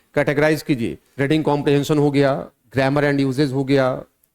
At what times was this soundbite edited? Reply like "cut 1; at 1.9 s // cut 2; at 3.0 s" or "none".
cut 1; at 1.0 s